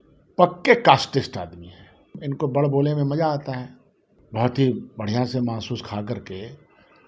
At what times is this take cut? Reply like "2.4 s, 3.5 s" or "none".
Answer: 2.1 s